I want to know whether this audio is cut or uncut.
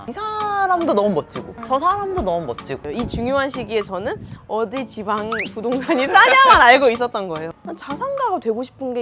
cut